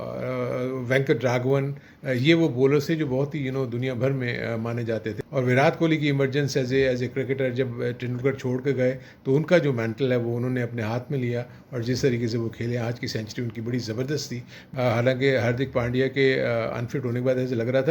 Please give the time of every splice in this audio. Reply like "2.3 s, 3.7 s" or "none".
5.1 s, 14.5 s